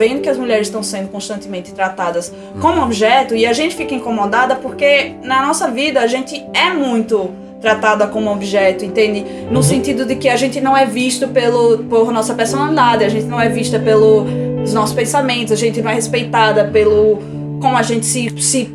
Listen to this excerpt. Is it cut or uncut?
uncut